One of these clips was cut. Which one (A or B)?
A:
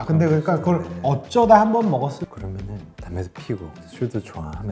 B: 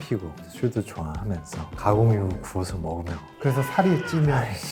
A